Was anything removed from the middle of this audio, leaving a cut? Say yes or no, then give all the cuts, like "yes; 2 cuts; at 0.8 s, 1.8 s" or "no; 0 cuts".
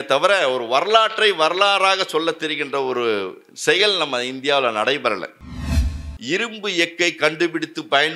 yes; 1 cut; at 6.0 s